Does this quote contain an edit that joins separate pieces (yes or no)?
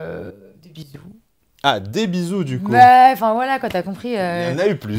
no